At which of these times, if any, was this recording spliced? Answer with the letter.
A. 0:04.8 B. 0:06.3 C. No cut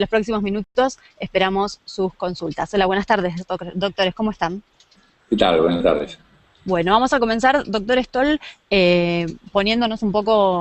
A